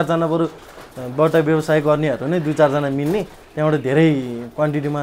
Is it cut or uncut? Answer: uncut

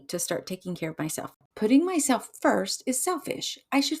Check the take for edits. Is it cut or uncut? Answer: cut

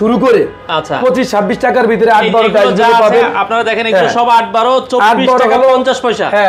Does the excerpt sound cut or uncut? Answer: uncut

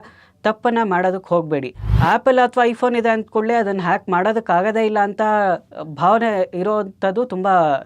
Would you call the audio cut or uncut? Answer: cut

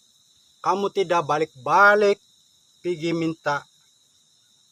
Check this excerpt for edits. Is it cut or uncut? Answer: uncut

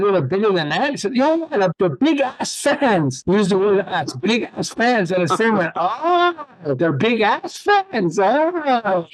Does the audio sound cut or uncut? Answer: uncut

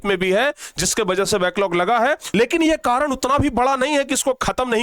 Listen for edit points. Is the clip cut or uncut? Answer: cut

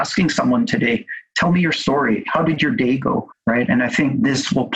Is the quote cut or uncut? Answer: cut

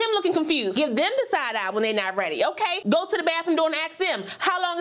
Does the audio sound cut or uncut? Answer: uncut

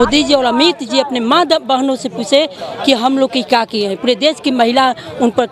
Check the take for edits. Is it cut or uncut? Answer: uncut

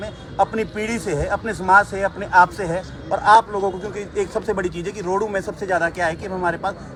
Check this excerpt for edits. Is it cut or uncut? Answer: uncut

